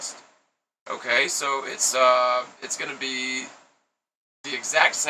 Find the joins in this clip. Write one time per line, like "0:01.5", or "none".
none

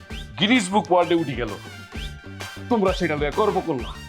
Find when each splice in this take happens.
0:02.5

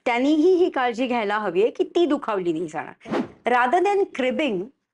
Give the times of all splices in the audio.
0:03.0

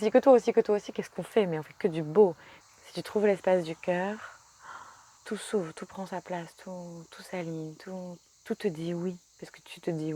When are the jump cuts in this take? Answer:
0:02.5
0:05.2
0:08.3

